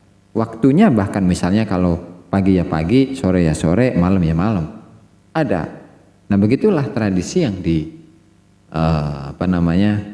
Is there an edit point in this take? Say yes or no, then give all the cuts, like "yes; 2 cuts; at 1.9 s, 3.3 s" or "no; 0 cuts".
no; 0 cuts